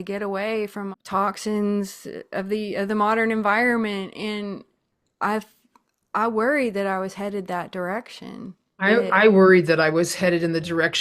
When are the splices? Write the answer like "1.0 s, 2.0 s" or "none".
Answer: 0.9 s, 8.8 s